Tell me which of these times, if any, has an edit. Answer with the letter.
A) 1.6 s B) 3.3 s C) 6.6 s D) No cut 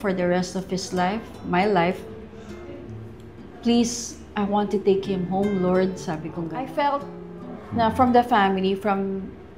C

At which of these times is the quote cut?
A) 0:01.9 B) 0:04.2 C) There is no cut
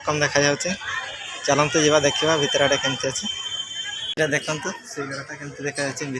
B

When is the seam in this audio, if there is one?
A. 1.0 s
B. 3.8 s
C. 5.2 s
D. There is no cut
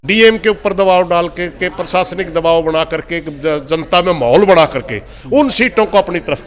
D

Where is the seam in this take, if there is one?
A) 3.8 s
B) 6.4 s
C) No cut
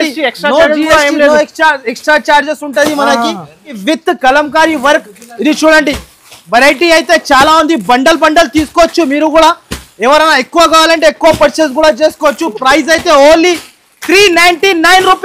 A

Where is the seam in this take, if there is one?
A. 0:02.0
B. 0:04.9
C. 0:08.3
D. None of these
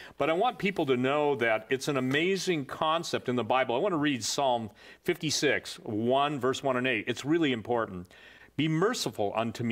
C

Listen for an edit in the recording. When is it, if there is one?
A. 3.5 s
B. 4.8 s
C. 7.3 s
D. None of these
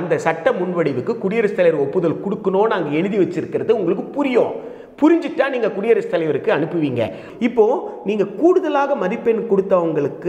C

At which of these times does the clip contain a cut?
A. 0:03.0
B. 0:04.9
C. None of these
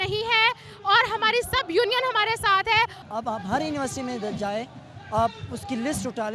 A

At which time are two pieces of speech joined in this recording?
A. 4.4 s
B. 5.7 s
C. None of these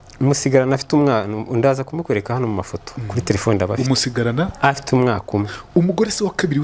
C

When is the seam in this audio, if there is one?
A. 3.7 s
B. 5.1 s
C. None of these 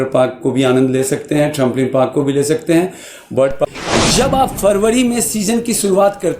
A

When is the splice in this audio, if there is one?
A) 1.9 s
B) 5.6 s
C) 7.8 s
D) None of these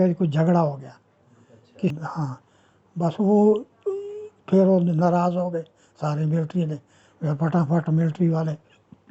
A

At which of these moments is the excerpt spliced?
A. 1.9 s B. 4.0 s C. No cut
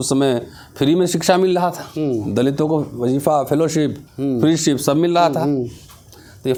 C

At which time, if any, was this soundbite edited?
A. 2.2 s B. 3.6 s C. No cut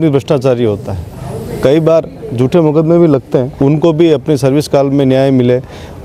B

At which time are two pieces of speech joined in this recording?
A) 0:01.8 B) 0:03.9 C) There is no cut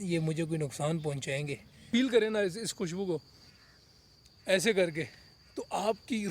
A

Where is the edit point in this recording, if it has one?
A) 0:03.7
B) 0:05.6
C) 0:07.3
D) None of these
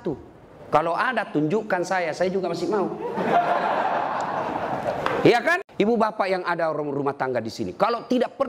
B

